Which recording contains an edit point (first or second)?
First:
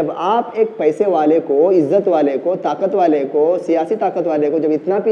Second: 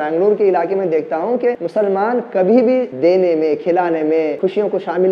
second